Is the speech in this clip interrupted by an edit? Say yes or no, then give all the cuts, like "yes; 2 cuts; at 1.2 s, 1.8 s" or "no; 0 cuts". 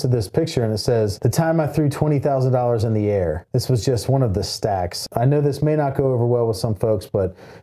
yes; 3 cuts; at 1.1 s, 3.4 s, 5.0 s